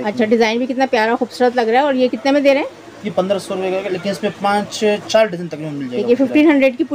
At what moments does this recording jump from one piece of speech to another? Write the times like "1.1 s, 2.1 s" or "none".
none